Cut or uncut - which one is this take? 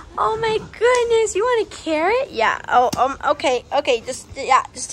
uncut